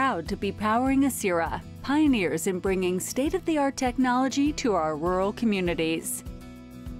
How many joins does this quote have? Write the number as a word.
one